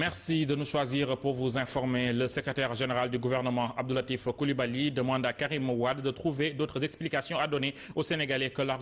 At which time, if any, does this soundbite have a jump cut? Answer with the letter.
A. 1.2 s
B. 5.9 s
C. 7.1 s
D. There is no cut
B